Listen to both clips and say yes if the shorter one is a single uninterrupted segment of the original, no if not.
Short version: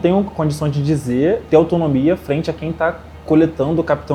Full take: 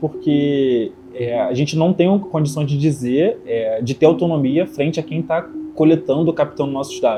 no